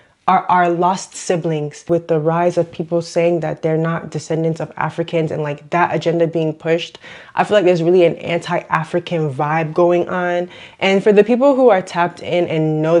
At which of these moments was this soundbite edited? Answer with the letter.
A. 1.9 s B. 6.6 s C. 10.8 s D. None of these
A